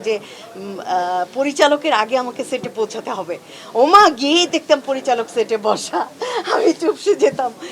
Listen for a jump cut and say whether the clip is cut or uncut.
uncut